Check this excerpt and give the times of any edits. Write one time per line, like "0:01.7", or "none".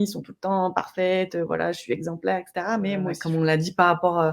0:03.2